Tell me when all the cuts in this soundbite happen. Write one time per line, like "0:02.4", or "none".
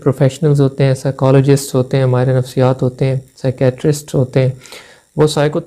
none